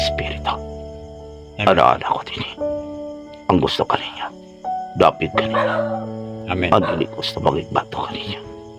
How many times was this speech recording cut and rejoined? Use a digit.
0